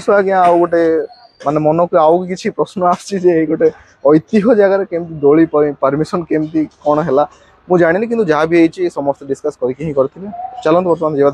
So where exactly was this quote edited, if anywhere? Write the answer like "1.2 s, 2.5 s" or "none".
none

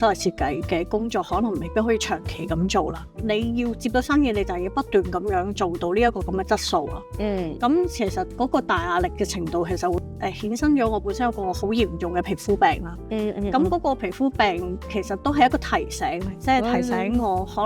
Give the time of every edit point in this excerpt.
3.2 s, 10.0 s

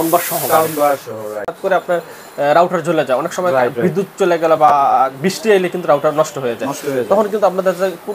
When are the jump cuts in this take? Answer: 1.6 s

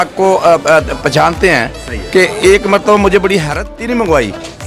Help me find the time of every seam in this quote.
3.6 s

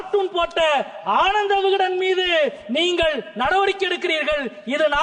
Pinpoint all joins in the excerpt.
none

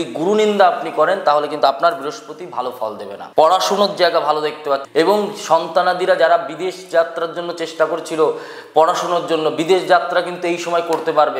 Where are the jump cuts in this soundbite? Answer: 3.1 s, 4.9 s

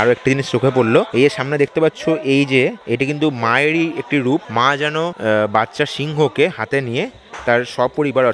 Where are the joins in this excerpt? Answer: 1.1 s, 2.8 s, 4.8 s

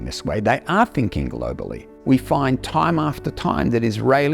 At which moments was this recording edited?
1.9 s

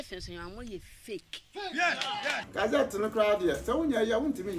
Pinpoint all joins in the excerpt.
2.4 s

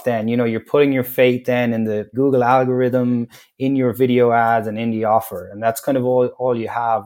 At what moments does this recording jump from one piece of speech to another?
2.1 s

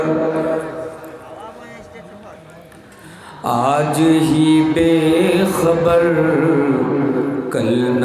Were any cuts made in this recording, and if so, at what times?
none

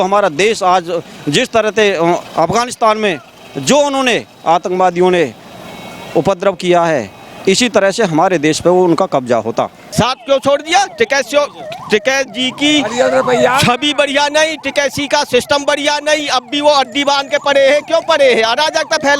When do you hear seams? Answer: 9.8 s

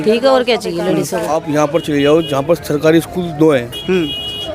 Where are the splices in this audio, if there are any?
1.3 s

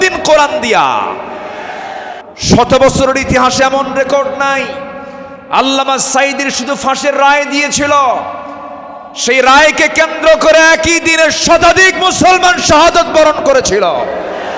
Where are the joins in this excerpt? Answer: 2.2 s

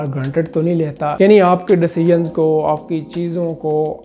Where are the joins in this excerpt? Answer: 1.2 s

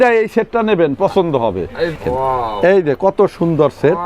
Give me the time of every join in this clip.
2.0 s

